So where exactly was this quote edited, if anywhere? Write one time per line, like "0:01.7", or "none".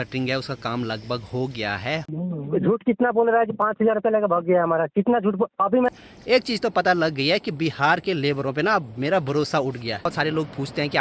0:02.1
0:05.9
0:10.1